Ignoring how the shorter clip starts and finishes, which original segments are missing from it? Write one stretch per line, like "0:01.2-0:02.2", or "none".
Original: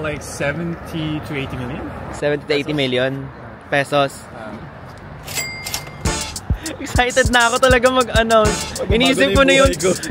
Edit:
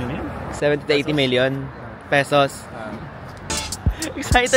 0:05.1-0:06.1